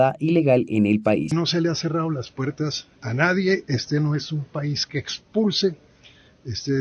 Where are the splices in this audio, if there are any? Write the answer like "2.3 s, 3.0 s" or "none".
1.3 s